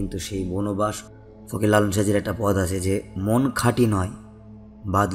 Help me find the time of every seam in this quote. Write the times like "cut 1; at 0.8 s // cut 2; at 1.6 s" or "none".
cut 1; at 1.0 s